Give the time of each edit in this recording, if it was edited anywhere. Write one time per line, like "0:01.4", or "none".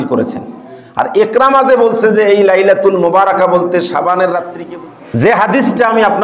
0:04.5